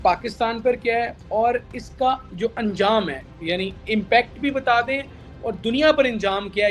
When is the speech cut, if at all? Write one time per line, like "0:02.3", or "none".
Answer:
none

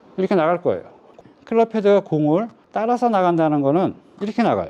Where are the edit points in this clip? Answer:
0:01.2

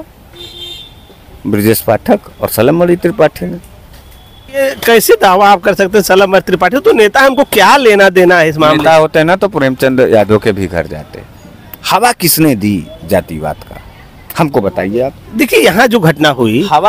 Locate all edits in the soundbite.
0:04.6

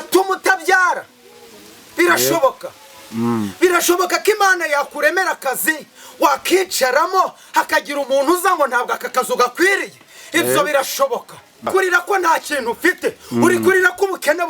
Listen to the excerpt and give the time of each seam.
0:11.7

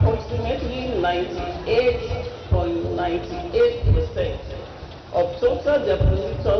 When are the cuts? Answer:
none

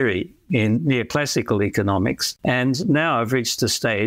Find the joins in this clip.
0:02.3

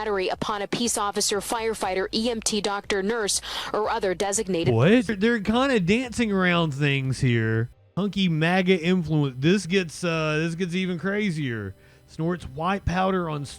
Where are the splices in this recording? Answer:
0:05.1
0:07.8

